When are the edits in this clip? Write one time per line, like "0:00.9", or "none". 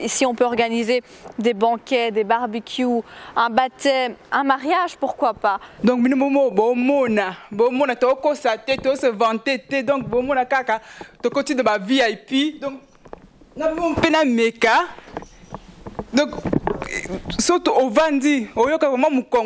0:05.7